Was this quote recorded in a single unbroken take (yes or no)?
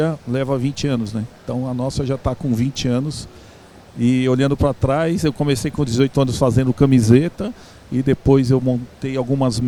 yes